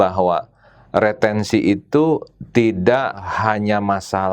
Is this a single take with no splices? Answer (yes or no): no